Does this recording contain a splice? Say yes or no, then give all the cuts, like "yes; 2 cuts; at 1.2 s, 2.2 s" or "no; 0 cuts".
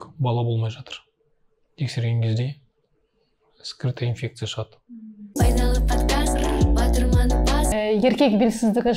no; 0 cuts